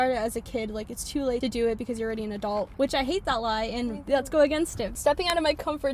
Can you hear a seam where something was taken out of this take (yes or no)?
yes